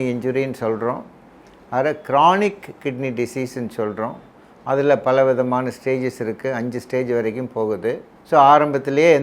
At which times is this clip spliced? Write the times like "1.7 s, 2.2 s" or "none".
none